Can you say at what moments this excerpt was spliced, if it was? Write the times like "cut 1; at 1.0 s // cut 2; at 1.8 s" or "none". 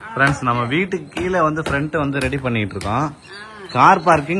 none